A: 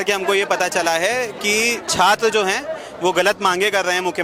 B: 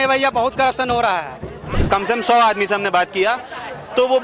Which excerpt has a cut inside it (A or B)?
B